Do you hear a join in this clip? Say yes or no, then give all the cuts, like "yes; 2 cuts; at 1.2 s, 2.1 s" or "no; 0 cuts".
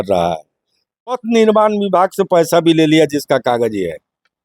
yes; 1 cut; at 1.2 s